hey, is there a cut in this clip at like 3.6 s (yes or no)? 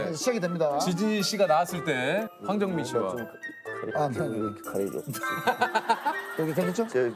no